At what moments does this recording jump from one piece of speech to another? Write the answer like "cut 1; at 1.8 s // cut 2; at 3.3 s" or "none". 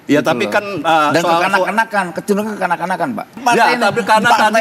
cut 1; at 3.3 s